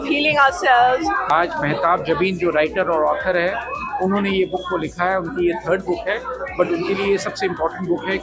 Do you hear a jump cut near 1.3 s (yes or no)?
yes